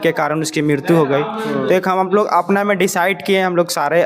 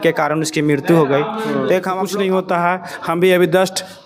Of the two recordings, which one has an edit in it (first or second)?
second